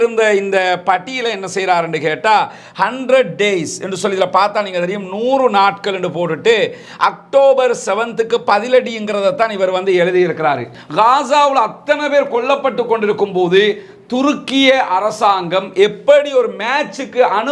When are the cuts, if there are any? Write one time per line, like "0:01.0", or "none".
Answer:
0:10.8